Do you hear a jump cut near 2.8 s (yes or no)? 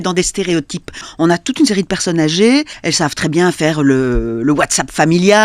yes